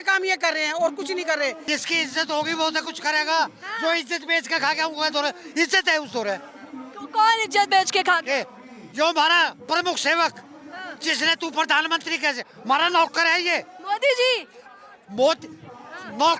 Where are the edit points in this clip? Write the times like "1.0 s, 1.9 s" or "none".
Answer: 1.6 s